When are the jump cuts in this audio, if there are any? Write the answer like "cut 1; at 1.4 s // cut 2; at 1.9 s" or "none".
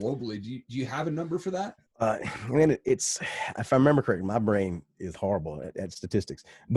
cut 1; at 1.8 s